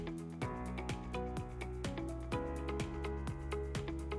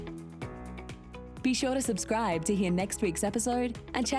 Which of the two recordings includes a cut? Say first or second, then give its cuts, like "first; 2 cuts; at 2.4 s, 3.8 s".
second; 1 cut; at 1.3 s